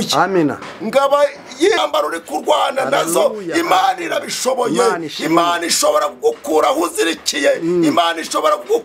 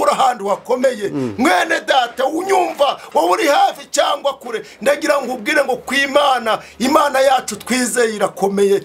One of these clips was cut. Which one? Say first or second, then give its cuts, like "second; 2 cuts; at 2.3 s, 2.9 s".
first; 1 cut; at 1.8 s